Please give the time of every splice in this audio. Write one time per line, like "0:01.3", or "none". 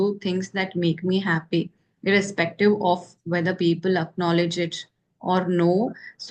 none